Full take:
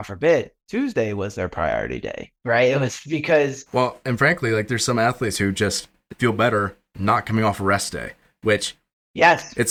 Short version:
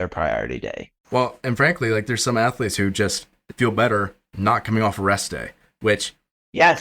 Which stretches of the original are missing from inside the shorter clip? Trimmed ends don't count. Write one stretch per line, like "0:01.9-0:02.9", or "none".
0:02.4-0:03.6